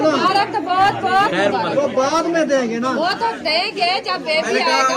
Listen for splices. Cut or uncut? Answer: uncut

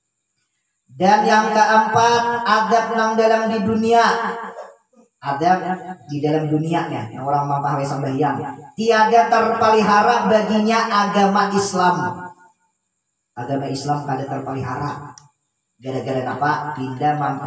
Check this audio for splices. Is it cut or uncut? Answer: uncut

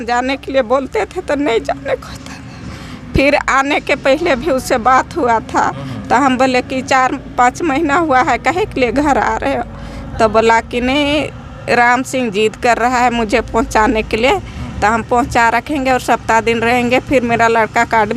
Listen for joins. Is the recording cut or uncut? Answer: uncut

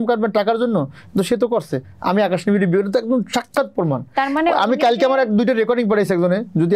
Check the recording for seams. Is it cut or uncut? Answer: uncut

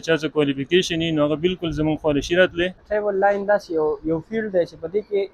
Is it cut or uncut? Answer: cut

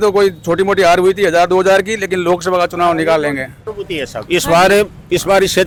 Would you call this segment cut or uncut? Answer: uncut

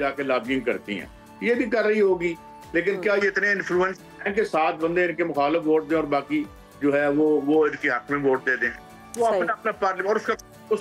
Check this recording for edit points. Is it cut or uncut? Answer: uncut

